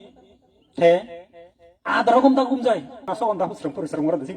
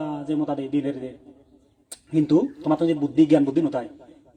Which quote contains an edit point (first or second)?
first